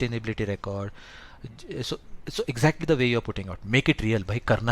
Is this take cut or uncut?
uncut